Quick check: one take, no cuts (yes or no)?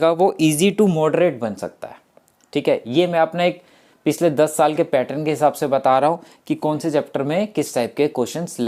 yes